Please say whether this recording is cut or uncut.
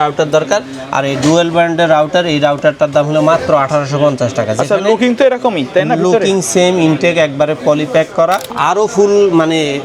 cut